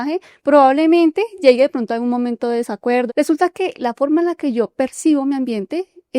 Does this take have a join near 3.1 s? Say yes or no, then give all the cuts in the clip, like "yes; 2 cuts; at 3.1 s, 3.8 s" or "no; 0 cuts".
yes; 1 cut; at 3.1 s